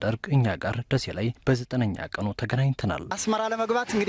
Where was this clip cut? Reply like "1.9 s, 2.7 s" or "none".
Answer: 3.1 s